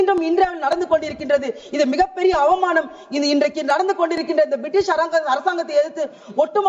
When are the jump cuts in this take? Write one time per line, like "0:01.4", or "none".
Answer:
none